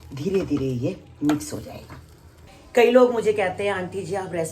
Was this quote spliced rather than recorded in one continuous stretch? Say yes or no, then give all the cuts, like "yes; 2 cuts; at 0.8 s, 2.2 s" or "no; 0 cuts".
no; 0 cuts